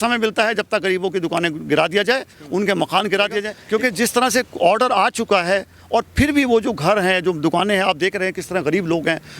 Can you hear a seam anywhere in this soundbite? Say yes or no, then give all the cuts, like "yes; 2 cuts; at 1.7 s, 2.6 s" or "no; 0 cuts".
yes; 1 cut; at 3.5 s